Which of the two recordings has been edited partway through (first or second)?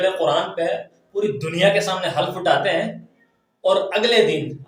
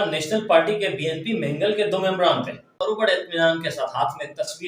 second